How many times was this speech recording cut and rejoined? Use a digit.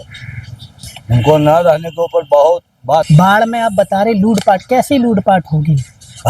1